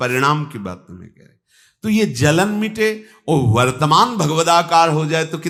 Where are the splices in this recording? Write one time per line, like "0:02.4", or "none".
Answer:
none

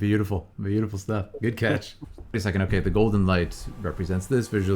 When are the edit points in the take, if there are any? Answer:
0:02.4

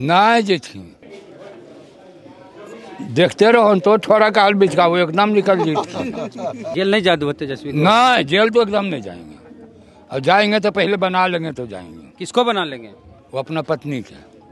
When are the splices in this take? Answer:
0:01.0
0:06.6

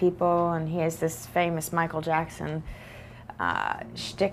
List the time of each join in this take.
none

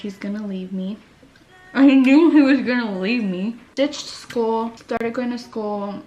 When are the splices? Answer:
0:03.6
0:04.8

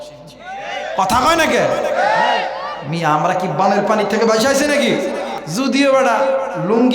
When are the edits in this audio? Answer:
0:05.4

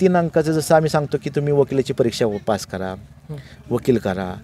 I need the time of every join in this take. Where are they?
none

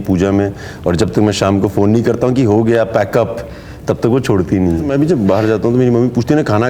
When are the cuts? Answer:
0:04.9

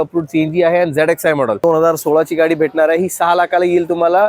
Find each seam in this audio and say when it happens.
0:01.6

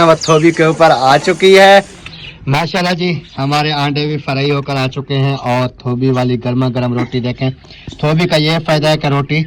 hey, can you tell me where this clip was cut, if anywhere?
0:02.0

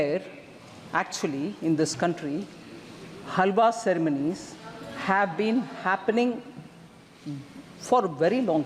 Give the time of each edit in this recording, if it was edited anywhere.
none

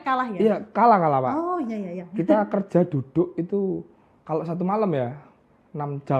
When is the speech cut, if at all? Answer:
none

